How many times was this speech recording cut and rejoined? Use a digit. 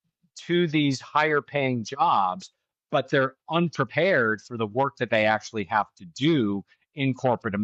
0